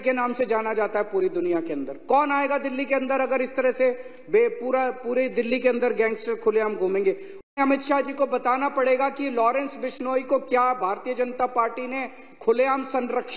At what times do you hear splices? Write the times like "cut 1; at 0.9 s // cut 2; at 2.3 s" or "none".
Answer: cut 1; at 7.5 s